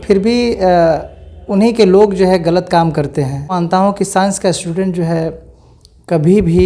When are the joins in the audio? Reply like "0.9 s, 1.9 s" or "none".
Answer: 3.6 s

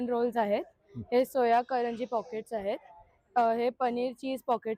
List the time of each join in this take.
none

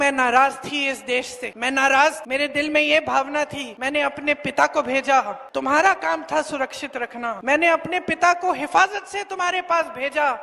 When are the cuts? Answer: 1.4 s, 2.2 s, 3.7 s, 5.4 s, 7.4 s

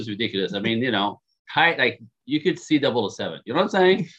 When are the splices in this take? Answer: none

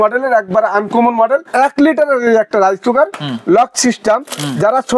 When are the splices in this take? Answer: 1.5 s

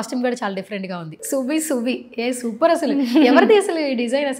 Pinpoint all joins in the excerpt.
1.2 s

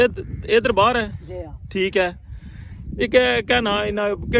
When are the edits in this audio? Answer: none

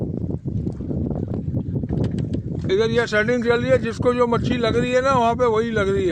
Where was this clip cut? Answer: 1.3 s

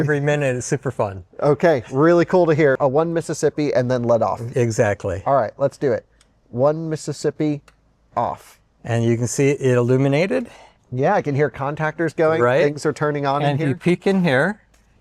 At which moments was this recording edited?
2.8 s

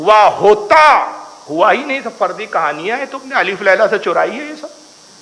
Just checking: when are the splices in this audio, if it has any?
none

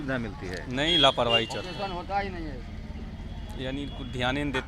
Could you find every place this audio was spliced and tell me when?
none

